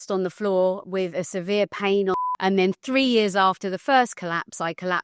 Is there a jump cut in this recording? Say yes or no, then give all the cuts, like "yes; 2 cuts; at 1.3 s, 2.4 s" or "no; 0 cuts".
yes; 1 cut; at 2.1 s